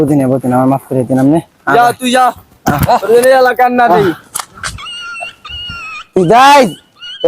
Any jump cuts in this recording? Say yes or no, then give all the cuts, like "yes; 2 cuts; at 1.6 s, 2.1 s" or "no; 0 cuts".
yes; 1 cut; at 1.5 s